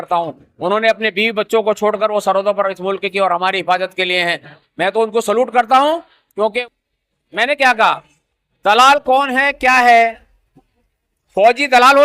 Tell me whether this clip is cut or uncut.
cut